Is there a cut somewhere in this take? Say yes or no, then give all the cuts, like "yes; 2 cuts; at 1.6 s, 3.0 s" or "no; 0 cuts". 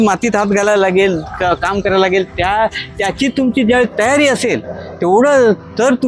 no; 0 cuts